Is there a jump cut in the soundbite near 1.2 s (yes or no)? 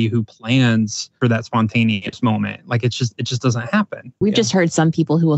yes